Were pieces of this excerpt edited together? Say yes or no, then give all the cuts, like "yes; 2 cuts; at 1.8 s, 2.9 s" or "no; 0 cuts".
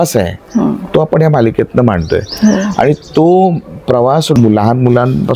yes; 1 cut; at 4.4 s